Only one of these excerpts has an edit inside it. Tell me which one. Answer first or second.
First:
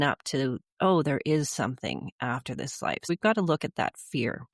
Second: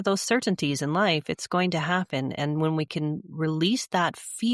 first